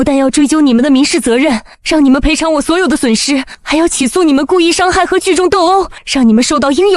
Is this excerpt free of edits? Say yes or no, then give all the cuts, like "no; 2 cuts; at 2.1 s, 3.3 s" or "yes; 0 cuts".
no; 3 cuts; at 1.7 s, 3.6 s, 6.0 s